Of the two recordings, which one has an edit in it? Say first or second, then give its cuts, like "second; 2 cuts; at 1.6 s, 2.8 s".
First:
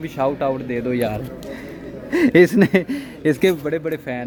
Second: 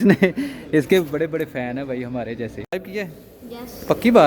second; 1 cut; at 2.7 s